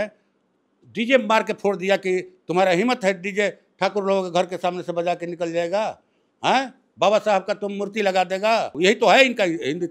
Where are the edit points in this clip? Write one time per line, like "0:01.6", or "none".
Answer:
0:08.7